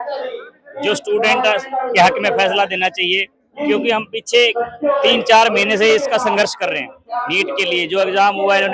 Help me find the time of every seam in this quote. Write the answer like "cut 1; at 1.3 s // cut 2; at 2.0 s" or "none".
none